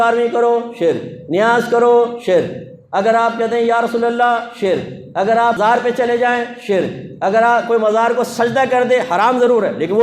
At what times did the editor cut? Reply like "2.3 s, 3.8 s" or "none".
5.6 s